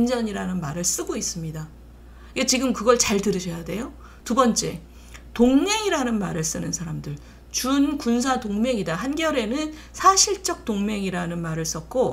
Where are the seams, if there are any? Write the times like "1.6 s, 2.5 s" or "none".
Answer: none